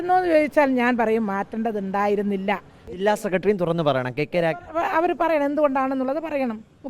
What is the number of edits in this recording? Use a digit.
1